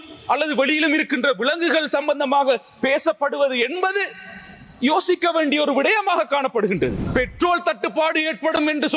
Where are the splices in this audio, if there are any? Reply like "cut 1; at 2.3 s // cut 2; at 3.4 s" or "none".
cut 1; at 7.0 s